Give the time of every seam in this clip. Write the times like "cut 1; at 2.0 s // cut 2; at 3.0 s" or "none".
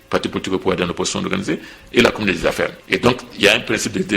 cut 1; at 2.8 s